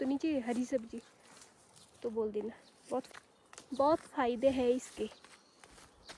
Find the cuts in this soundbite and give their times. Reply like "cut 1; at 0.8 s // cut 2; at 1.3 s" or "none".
none